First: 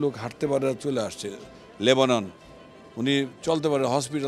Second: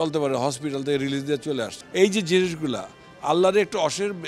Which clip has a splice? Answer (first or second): second